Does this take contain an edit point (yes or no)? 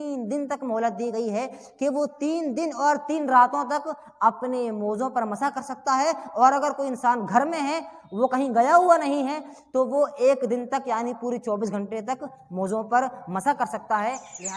no